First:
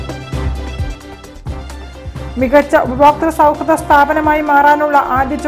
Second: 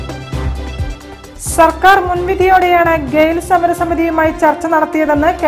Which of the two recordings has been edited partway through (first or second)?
second